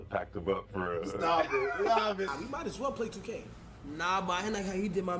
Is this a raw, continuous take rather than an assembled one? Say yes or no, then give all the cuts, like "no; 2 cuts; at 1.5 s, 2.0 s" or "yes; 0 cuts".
no; 1 cut; at 2.3 s